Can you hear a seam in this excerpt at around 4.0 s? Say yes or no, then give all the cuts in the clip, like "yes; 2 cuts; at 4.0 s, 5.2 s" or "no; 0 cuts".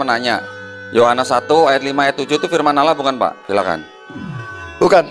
no; 0 cuts